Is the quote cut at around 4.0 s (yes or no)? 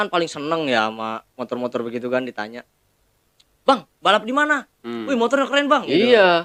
no